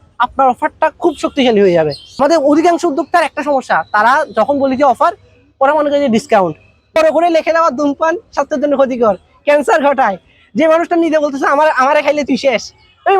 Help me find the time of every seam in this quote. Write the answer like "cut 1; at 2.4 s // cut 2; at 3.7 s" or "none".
cut 1; at 2.1 s // cut 2; at 7.0 s

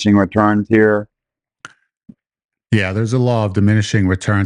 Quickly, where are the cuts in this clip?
none

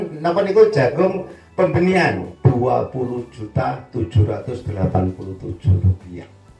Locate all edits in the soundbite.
cut 1; at 2.3 s

